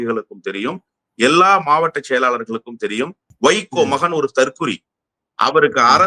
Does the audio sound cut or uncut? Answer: cut